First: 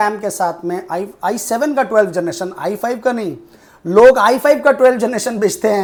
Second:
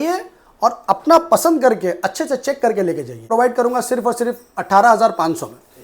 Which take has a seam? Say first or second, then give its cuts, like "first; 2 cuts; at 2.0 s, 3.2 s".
second; 1 cut; at 3.3 s